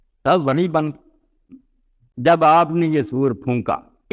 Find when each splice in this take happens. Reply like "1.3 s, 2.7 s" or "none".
2.0 s